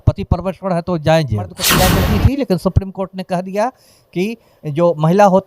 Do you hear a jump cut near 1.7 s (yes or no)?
yes